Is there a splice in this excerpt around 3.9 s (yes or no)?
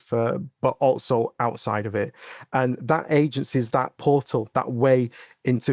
yes